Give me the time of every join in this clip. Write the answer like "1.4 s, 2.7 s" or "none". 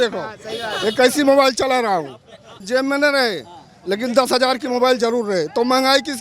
2.5 s

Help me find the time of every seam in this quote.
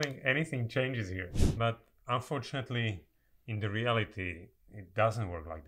1.4 s

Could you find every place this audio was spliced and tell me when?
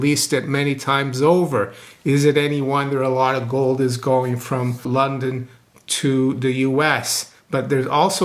4.8 s

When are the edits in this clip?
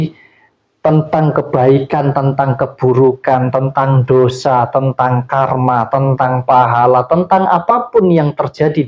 none

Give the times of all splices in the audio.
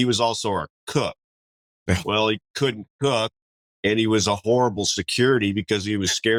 none

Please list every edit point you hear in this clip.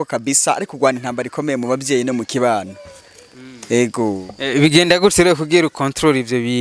none

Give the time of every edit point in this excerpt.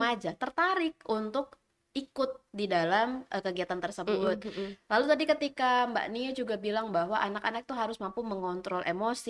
none

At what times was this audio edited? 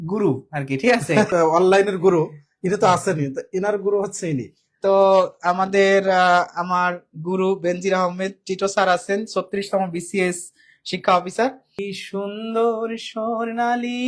11.9 s

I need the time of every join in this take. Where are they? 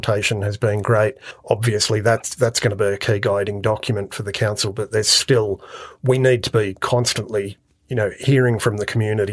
1.3 s

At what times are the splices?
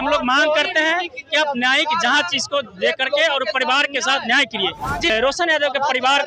5.1 s

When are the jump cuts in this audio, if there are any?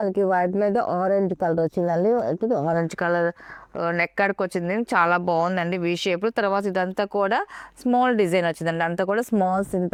none

